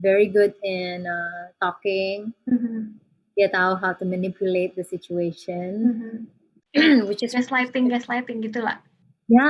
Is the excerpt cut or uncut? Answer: uncut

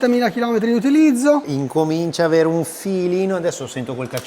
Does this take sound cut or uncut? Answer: cut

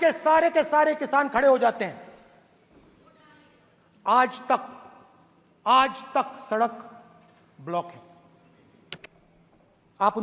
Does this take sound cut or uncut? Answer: uncut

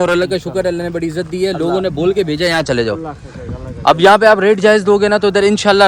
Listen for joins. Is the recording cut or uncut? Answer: uncut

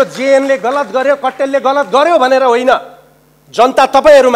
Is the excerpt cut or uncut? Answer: uncut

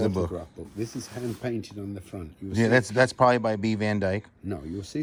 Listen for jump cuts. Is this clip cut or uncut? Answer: uncut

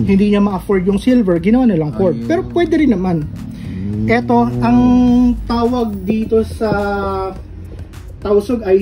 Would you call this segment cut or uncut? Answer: uncut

